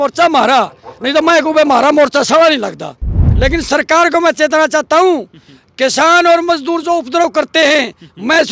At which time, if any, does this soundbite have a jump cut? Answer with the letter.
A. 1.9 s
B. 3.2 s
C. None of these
B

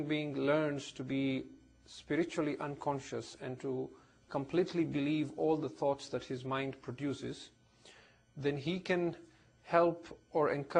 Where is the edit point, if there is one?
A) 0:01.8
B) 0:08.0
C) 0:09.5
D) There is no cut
C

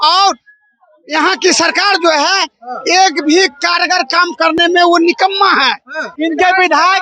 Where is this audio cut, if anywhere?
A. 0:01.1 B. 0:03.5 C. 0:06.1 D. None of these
C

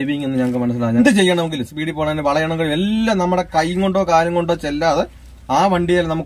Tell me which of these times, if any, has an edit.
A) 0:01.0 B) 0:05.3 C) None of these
A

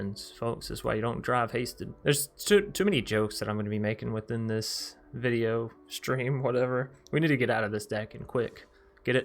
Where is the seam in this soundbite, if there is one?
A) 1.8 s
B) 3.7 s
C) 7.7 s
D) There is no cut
A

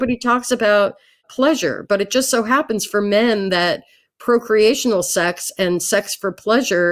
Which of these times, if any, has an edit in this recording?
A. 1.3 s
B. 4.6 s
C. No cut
A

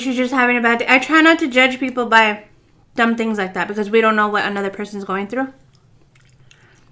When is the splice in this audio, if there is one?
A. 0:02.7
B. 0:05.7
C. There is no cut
C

